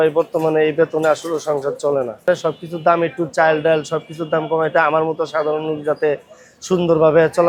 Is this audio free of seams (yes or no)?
yes